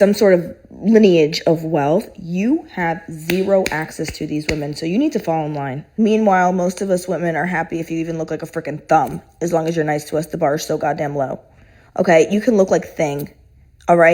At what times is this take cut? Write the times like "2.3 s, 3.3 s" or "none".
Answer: 6.4 s, 12.3 s